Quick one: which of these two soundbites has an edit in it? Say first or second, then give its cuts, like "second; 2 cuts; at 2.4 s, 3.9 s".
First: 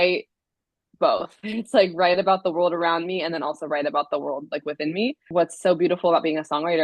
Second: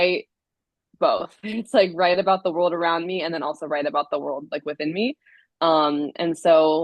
first; 1 cut; at 5.2 s